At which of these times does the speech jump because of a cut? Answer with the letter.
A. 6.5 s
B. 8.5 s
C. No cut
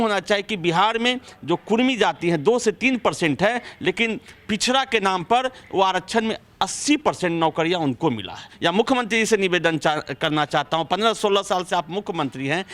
B